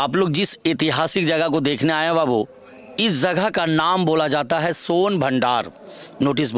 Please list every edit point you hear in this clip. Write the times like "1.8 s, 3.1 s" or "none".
none